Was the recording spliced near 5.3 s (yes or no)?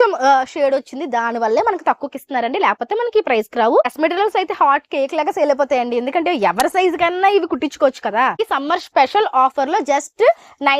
no